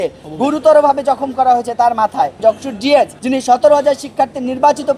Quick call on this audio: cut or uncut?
cut